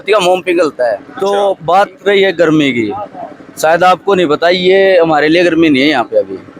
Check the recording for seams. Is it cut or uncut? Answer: cut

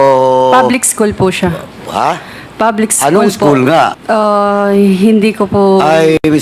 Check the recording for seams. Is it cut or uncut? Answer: cut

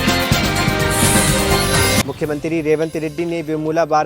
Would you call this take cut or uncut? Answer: cut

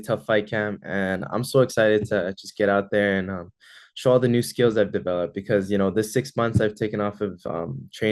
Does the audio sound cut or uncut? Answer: uncut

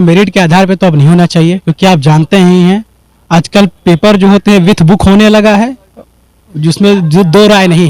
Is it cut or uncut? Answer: uncut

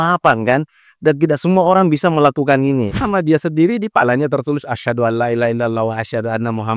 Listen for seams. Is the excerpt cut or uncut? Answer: cut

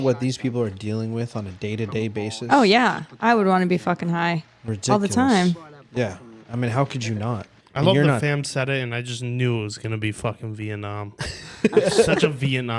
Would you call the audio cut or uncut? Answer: uncut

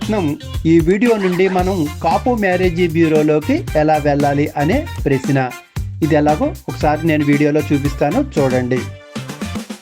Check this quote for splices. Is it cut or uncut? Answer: cut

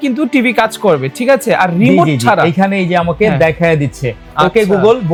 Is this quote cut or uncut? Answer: uncut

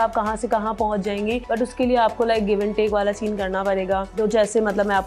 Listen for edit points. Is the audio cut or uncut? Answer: cut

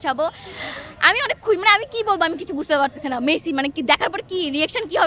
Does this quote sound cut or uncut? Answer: uncut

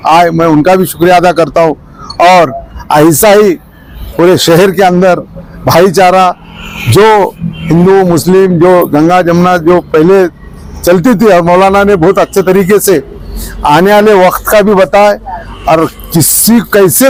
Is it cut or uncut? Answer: uncut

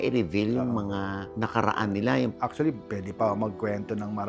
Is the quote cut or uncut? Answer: cut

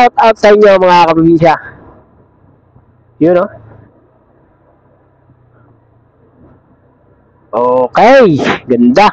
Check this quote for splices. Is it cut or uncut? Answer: uncut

